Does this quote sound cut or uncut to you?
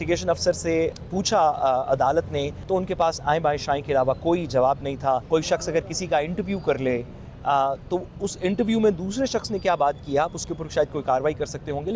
cut